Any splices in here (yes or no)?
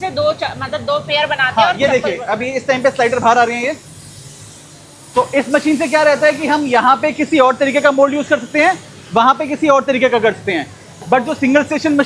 no